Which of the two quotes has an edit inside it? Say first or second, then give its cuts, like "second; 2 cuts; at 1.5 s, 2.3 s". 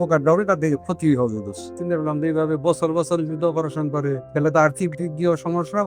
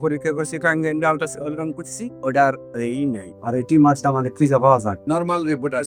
first; 2 cuts; at 1.7 s, 4.2 s